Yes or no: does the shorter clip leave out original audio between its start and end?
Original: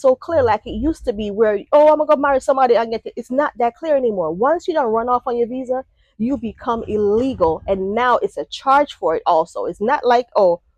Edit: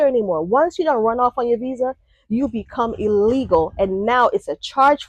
no